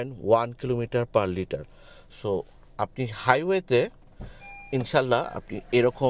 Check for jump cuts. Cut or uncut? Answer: uncut